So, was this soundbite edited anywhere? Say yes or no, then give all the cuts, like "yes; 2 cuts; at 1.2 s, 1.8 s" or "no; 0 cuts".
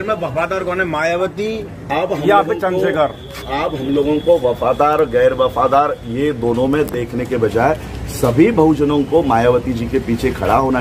no; 0 cuts